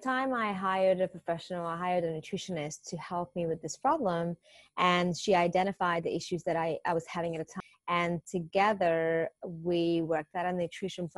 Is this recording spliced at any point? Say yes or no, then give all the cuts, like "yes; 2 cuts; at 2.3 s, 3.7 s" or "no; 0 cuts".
yes; 1 cut; at 7.6 s